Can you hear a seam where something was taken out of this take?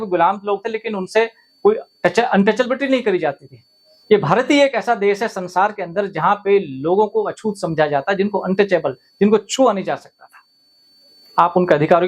no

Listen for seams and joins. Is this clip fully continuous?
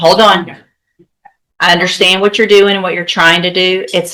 yes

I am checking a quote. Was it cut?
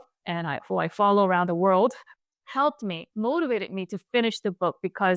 yes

